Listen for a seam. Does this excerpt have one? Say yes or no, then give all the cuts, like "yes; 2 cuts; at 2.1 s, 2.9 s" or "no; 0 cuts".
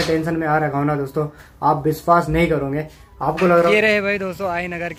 yes; 1 cut; at 3.7 s